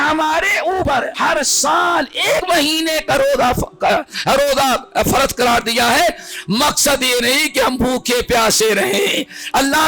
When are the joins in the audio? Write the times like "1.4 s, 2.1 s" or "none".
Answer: 0.9 s, 2.4 s